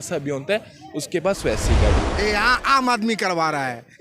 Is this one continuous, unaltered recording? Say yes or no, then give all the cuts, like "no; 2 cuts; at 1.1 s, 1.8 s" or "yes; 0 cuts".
no; 1 cut; at 2.1 s